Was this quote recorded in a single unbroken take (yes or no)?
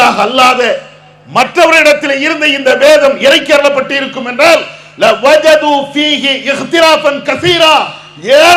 yes